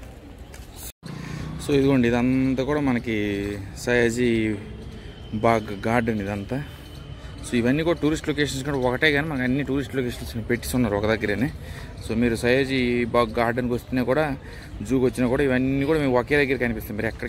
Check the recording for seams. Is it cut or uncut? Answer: cut